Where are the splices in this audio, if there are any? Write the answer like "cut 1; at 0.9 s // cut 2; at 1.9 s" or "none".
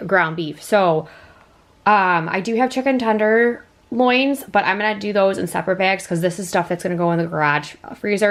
none